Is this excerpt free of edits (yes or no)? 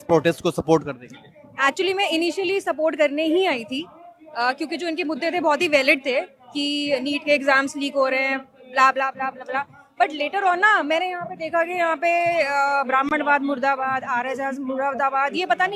yes